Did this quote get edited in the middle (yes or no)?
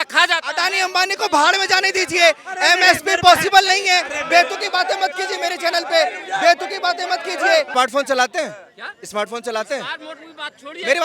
yes